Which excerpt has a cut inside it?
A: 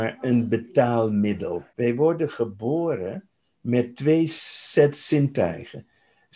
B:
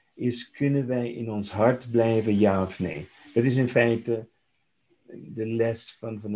A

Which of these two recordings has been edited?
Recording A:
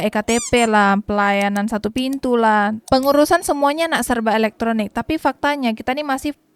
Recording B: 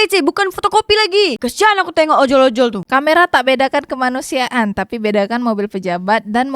B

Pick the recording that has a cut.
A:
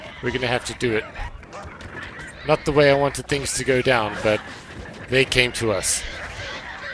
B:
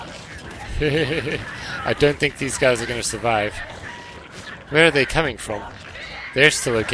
A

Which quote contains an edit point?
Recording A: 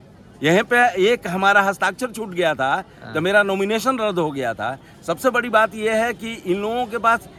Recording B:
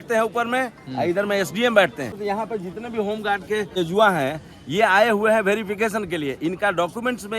B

